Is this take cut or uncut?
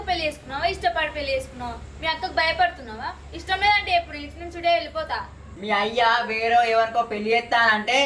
cut